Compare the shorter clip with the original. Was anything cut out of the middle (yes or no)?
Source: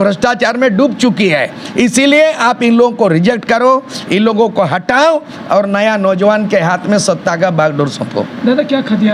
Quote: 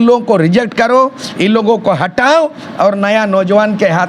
no